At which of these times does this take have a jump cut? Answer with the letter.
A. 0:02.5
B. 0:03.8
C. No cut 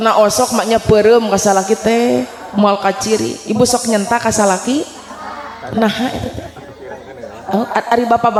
C